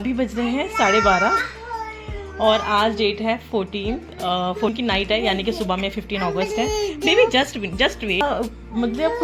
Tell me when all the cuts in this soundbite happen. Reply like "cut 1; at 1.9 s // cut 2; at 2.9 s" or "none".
cut 1; at 8.2 s